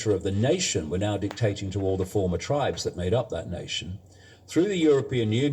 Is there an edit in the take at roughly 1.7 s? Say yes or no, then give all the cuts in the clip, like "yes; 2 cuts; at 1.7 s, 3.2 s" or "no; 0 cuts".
yes; 1 cut; at 1.7 s